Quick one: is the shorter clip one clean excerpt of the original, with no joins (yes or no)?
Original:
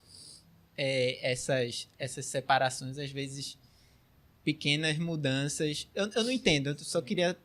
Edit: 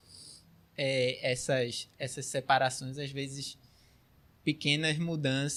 yes